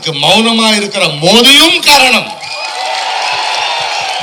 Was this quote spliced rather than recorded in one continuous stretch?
no; 0 cuts

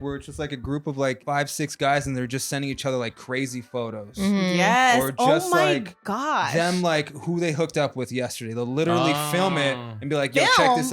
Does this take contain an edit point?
yes; 1 cut; at 1.2 s

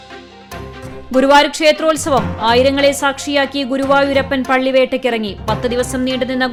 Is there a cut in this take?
no; 0 cuts

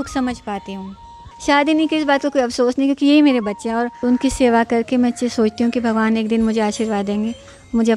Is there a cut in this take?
yes; 2 cuts; at 1.2 s, 3.9 s

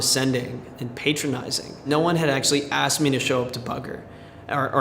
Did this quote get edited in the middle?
yes; 1 cut; at 1.8 s

